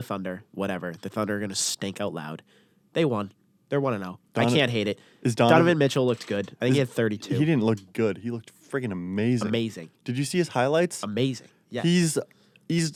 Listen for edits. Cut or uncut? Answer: uncut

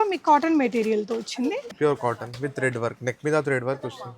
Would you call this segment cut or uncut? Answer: cut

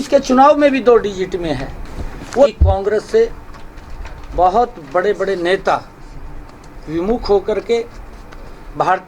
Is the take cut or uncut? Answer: cut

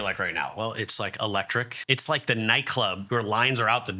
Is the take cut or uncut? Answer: cut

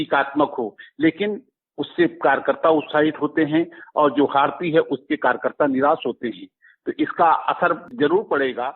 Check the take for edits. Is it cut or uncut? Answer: cut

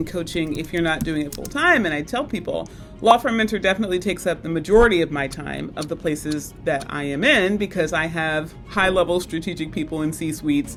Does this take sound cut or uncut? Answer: uncut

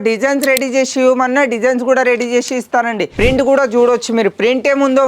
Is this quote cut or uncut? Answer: cut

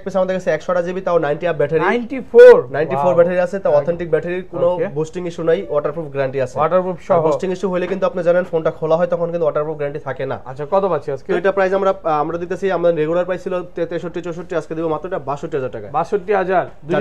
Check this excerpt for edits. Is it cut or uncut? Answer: uncut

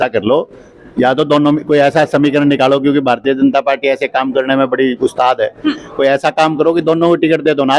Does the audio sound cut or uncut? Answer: uncut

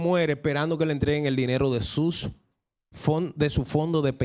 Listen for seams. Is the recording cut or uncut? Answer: uncut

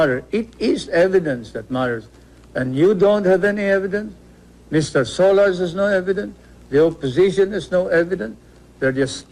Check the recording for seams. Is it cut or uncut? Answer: uncut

